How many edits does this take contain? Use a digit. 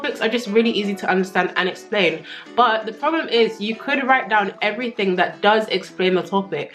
0